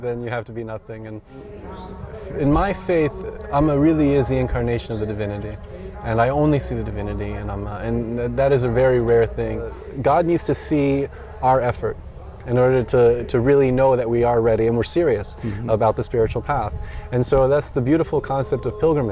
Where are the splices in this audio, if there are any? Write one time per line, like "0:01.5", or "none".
0:01.6
0:09.8